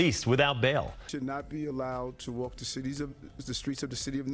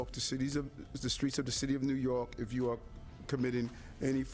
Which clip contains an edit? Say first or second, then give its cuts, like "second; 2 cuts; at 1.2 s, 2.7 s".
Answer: first; 1 cut; at 1.1 s